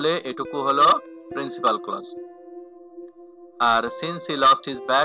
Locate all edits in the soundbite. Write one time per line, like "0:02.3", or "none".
0:02.0
0:03.6